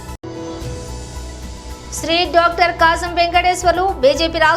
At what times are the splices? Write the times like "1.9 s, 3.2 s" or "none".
none